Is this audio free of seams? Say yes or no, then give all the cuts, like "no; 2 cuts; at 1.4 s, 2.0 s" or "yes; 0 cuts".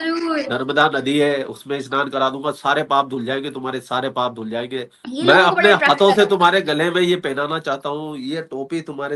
no; 1 cut; at 5.0 s